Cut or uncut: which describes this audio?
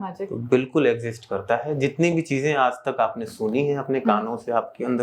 uncut